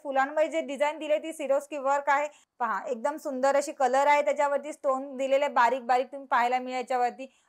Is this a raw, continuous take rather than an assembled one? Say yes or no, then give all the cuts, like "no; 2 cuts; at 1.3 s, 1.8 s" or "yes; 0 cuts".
no; 1 cut; at 2.4 s